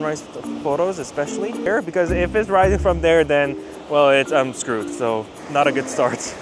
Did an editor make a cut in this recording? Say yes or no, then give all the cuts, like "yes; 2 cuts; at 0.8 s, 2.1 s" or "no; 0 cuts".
yes; 2 cuts; at 1.7 s, 5.3 s